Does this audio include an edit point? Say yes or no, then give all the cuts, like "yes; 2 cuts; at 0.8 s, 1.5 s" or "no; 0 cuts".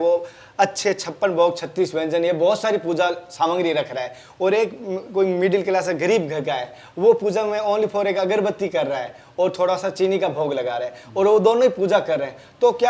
no; 0 cuts